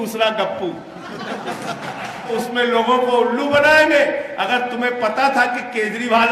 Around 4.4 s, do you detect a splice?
no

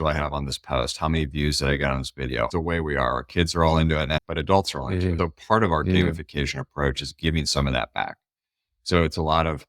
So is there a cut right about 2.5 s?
yes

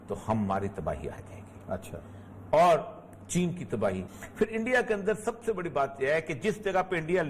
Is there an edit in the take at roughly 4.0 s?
yes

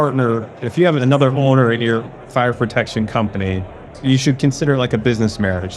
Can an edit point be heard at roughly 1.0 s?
yes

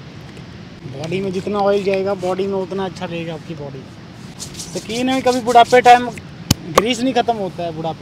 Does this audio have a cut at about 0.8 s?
yes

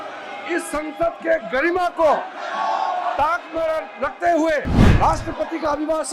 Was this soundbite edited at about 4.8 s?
yes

